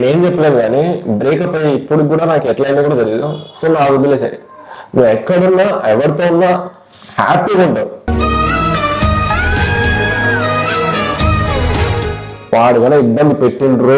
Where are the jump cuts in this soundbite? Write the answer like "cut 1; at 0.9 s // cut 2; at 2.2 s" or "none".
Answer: cut 1; at 12.3 s